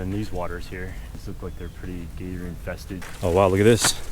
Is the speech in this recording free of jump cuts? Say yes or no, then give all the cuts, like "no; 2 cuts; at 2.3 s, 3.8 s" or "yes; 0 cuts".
no; 2 cuts; at 1.2 s, 3.1 s